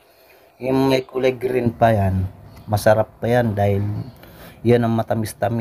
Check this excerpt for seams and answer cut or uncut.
uncut